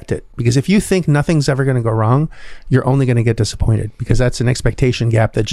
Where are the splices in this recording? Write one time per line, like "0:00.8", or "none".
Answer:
none